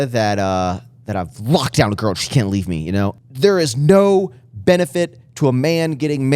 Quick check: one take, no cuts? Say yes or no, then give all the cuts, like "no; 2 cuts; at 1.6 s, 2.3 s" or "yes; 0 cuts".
no; 1 cut; at 3.2 s